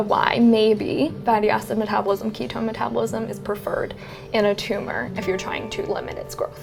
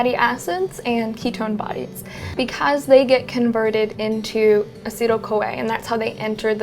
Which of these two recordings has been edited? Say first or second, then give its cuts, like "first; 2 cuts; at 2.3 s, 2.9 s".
second; 1 cut; at 2.3 s